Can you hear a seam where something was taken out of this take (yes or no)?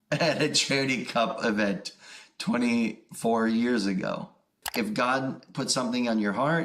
yes